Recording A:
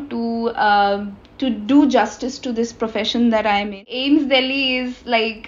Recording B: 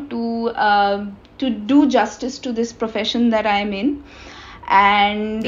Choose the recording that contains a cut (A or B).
A